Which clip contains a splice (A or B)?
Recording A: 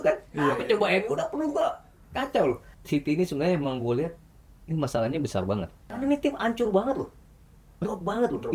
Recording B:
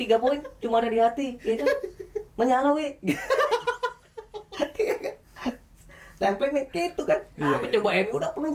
A